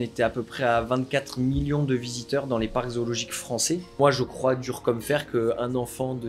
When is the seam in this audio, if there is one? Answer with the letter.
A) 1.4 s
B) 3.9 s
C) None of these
B